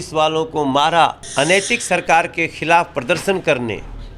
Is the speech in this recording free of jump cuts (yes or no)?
no